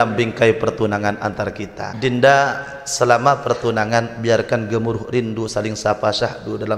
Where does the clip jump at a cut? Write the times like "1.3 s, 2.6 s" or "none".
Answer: 1.9 s